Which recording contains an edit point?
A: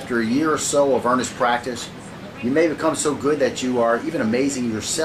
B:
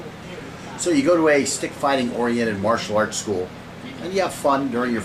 A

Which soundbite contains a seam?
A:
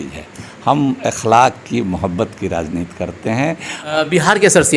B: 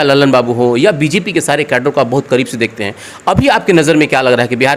A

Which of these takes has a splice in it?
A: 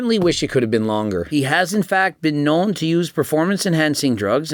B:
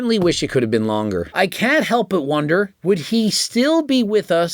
B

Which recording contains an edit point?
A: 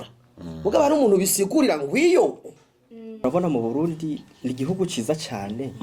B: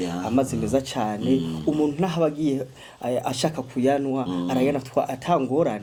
A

